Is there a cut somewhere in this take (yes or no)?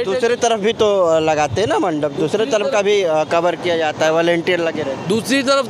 no